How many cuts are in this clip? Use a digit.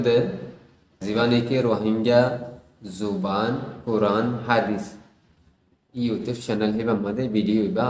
1